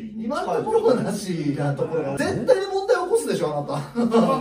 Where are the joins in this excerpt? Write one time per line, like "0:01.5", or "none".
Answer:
0:02.1